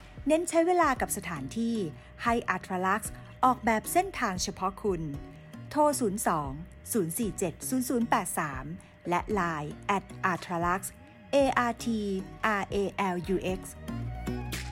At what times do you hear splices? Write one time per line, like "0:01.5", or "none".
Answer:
0:13.7